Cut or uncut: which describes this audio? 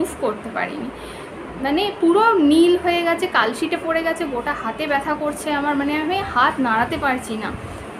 uncut